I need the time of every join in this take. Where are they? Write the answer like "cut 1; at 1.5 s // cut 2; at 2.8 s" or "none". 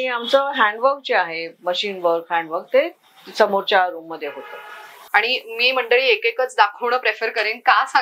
cut 1; at 4.9 s